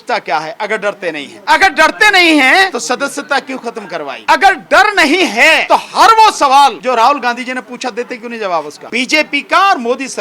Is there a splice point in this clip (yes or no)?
yes